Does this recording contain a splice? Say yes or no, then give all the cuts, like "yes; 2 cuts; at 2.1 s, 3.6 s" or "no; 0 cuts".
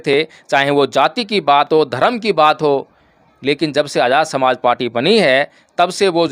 no; 0 cuts